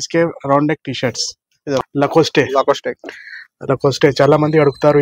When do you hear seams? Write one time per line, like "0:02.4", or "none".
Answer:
0:01.8